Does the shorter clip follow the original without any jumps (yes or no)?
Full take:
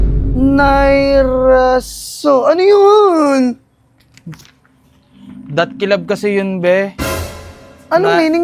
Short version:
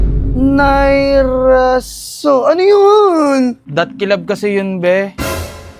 no